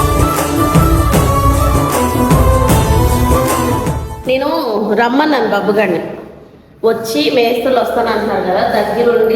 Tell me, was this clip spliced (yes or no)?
yes